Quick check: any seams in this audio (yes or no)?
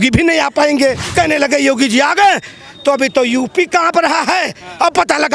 yes